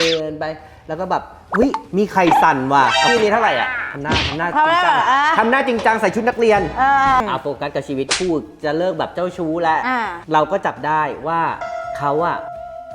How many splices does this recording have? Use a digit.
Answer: 3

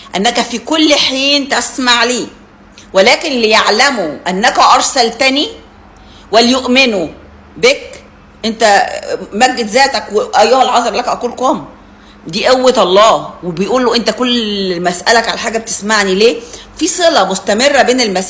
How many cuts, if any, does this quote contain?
1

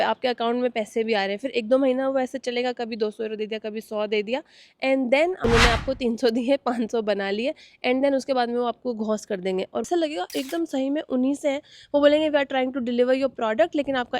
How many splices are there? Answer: 2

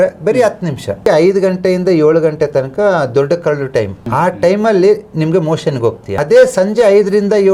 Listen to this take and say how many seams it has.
3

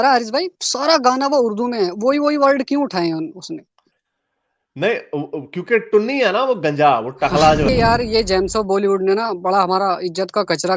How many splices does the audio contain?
1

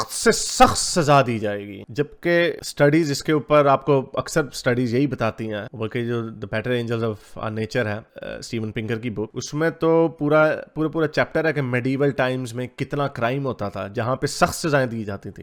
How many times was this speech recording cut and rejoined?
0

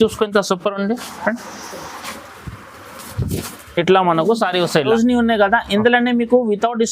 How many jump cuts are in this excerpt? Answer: 1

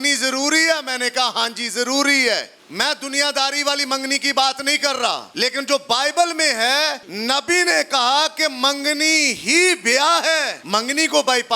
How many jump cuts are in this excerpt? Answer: 4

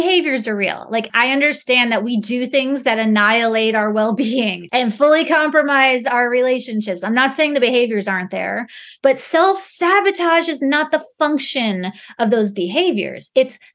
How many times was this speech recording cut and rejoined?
2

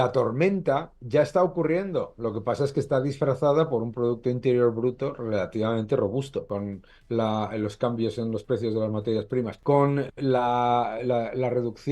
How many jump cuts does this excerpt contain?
2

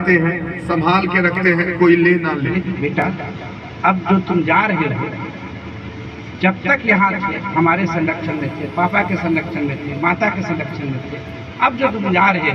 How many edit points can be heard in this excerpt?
1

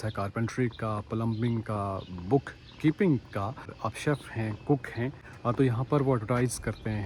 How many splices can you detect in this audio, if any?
2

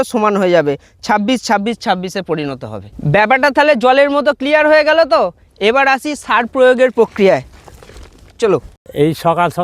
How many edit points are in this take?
0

